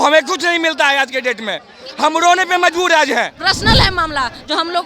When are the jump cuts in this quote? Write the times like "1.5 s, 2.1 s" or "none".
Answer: 3.3 s